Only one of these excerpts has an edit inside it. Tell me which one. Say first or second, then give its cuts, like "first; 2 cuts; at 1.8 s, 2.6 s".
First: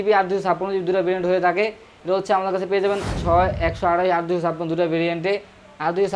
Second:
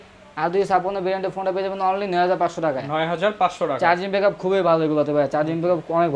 first; 1 cut; at 3.1 s